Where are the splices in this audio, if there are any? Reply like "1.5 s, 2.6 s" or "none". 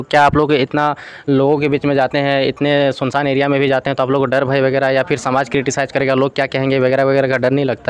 none